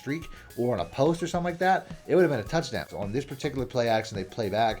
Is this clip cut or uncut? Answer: cut